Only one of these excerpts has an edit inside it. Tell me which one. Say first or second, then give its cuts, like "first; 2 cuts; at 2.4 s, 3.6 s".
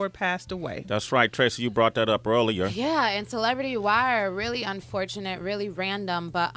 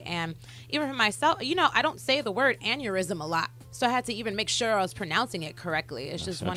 first; 1 cut; at 1.1 s